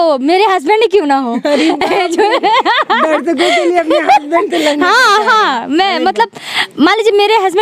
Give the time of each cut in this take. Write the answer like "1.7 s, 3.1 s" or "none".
none